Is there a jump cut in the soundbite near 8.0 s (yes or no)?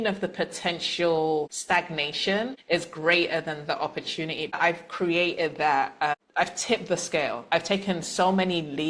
no